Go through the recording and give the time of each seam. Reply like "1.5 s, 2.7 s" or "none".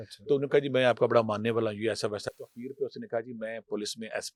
none